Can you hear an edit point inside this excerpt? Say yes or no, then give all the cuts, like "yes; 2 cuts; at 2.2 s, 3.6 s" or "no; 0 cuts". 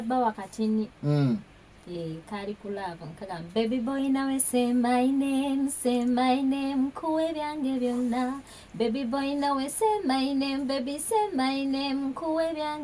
no; 0 cuts